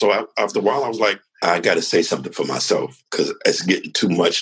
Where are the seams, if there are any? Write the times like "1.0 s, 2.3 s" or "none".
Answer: 1.3 s